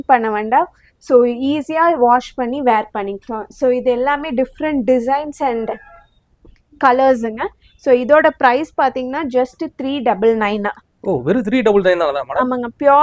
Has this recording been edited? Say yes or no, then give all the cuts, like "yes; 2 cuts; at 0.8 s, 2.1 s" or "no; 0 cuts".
no; 0 cuts